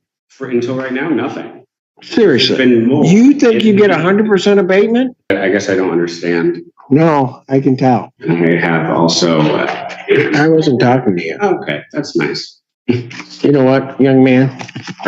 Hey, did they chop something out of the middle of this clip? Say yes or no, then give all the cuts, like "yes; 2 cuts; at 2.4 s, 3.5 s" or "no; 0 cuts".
yes; 2 cuts; at 5.3 s, 8.1 s